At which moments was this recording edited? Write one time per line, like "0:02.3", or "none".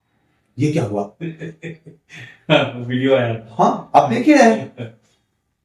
none

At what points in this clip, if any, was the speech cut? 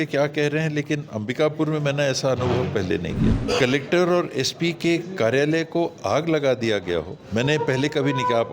0:03.3
0:07.2

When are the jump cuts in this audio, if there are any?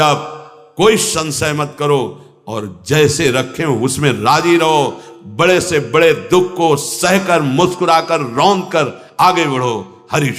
none

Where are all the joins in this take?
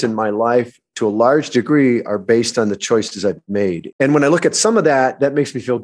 0:03.8

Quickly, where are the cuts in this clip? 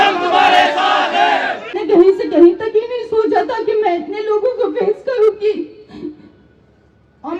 0:01.8

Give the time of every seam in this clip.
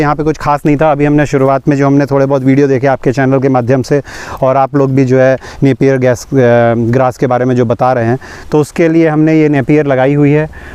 none

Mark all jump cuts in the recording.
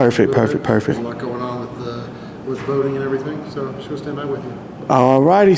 none

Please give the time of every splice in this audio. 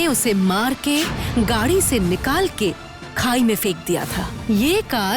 0:01.2
0:04.4

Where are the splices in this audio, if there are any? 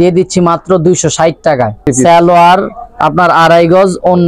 0:01.8

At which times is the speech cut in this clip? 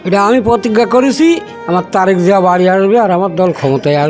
0:01.5

